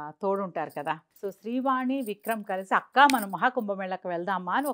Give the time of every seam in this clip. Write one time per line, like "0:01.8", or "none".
0:01.1